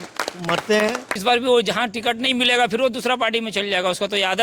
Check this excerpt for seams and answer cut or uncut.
cut